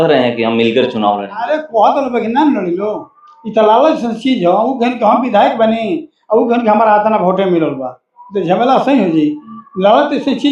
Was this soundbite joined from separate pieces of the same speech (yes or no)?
no